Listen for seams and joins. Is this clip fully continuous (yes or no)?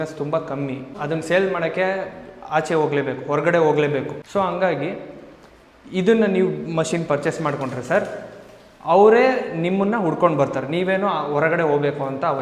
no